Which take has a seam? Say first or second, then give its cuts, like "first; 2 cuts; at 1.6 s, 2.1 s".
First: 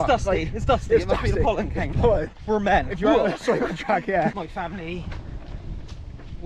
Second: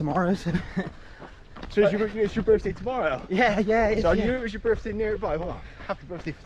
first; 1 cut; at 4.4 s